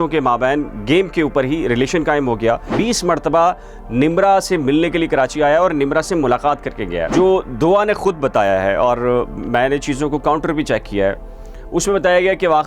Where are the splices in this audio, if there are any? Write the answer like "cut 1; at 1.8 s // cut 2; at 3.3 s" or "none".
cut 1; at 2.7 s // cut 2; at 7.1 s